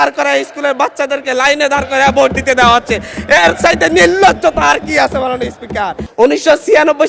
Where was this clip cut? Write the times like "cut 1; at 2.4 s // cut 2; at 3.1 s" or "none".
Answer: cut 1; at 6.0 s